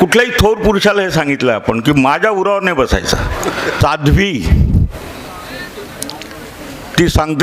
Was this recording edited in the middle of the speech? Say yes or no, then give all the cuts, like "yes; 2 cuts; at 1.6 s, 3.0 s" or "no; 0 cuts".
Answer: yes; 1 cut; at 3.7 s